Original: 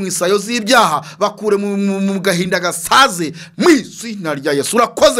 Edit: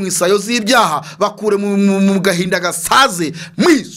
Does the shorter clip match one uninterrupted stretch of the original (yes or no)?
yes